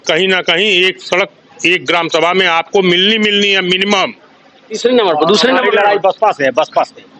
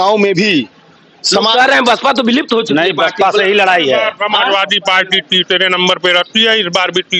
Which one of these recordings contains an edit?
first; 1 cut; at 4.7 s

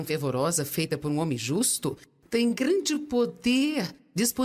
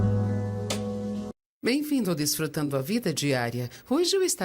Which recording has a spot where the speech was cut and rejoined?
second; 1 cut; at 1.4 s

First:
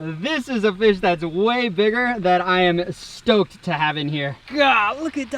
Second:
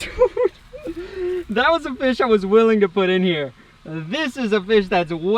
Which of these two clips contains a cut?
first; 1 cut; at 4.4 s

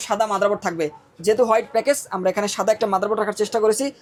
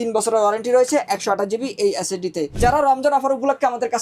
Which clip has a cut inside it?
second; 1 cut; at 2.5 s

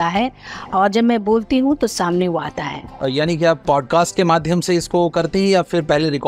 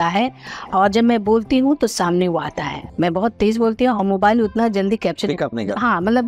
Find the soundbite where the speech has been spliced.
second; 1 cut; at 2.8 s

